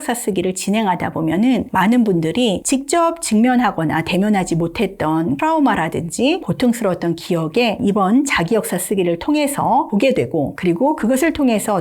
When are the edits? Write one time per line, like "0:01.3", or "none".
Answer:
0:01.7
0:02.6
0:05.4
0:06.5
0:07.8
0:10.1